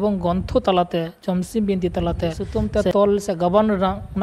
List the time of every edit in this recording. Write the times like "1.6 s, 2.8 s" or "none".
2.5 s

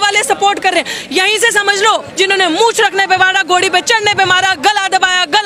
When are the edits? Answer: 2.1 s

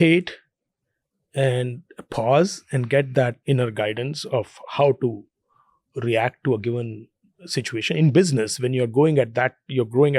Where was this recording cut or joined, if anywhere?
3.4 s

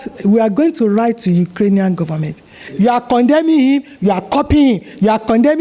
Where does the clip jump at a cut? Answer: 2.7 s

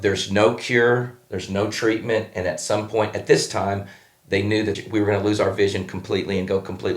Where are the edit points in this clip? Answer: 4.8 s

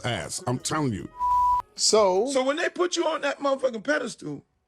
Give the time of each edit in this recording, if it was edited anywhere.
2.3 s

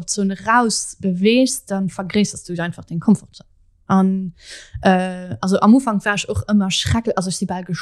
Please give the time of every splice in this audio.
none

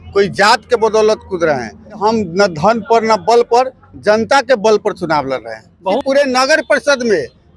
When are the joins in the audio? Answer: 2.0 s, 5.9 s

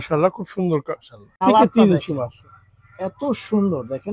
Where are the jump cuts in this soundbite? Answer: 1.4 s

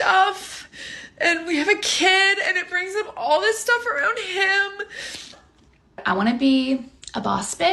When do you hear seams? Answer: 6.0 s

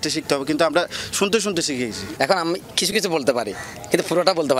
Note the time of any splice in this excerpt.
none

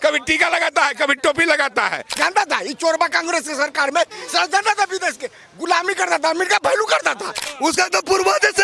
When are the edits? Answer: 2.1 s, 7.4 s

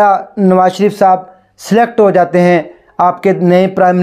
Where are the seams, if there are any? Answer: none

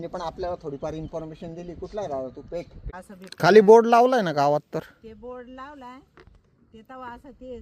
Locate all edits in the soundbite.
2.8 s

